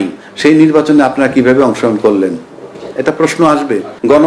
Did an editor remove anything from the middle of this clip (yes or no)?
no